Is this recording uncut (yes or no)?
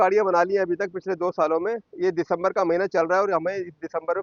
yes